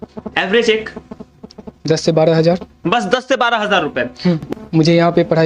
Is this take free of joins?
no; 1 cut; at 4.4 s

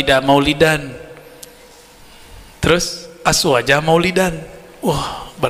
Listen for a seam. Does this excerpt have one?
no; 0 cuts

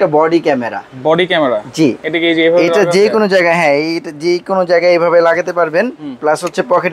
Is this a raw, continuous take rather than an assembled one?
yes; 0 cuts

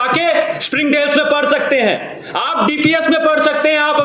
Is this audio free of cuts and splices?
yes; 0 cuts

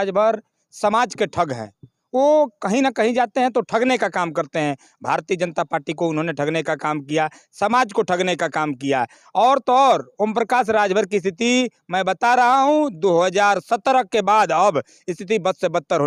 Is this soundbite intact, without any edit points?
yes; 0 cuts

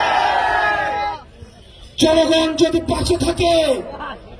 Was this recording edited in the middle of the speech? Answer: no; 0 cuts

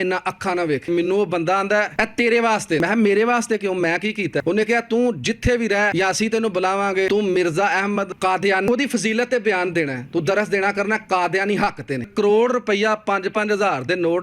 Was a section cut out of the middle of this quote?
yes; 8 cuts; at 0.9 s, 1.9 s, 2.8 s, 4.4 s, 5.9 s, 7.1 s, 8.6 s, 12.1 s

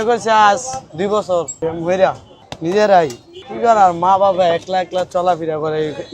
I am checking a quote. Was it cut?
yes; 2 cuts; at 1.5 s, 2.3 s

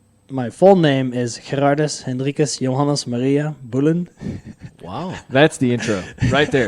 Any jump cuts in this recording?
no; 0 cuts

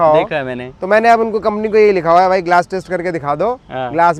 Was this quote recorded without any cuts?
yes; 0 cuts

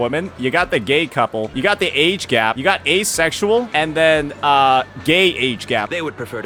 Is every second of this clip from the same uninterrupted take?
yes; 0 cuts

